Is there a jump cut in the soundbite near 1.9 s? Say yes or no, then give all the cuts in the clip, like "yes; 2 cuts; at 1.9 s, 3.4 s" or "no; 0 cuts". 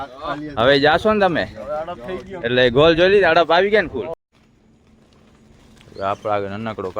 no; 1 cut; at 4.2 s